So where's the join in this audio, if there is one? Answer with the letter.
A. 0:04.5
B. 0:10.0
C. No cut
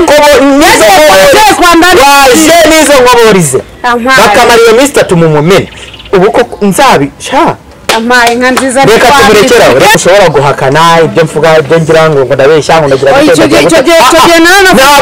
B